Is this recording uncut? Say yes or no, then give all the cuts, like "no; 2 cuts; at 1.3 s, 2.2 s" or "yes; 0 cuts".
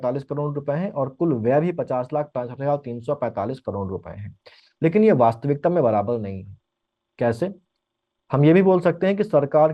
yes; 0 cuts